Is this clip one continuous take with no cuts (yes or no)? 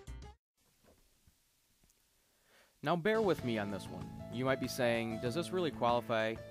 yes